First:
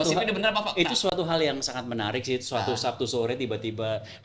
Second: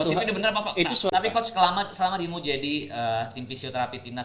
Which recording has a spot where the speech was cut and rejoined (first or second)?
second